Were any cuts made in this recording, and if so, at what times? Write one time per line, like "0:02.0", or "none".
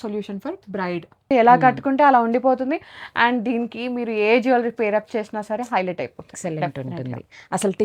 0:01.3

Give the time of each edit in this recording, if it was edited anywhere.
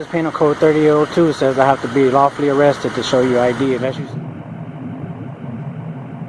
0:04.0

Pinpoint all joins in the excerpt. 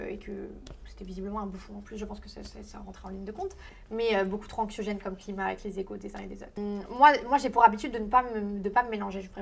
0:03.7
0:06.5

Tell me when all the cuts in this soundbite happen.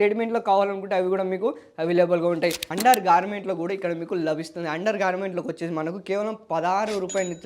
0:02.7

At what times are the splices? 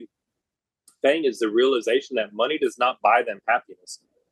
none

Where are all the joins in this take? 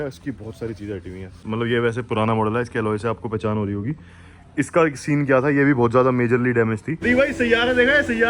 0:01.4
0:07.0

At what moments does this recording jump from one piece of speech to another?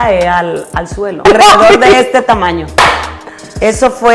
0:01.2

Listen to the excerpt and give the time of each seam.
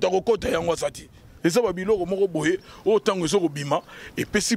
0:01.3

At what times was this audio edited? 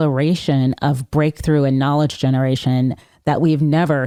none

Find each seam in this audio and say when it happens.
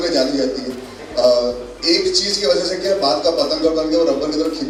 none

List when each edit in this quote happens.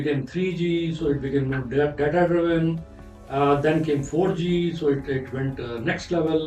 none

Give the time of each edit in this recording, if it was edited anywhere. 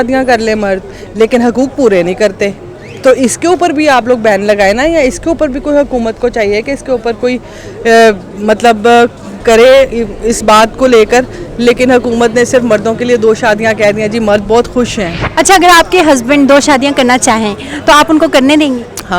0:15.2

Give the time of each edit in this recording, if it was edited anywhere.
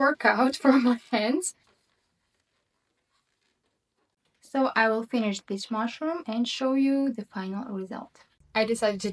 none

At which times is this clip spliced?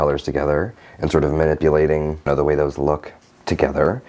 none

